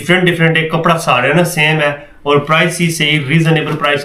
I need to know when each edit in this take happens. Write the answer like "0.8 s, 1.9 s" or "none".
none